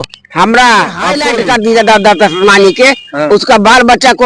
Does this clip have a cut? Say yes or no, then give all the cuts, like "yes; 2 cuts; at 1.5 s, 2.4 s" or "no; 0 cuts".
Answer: yes; 1 cut; at 1.2 s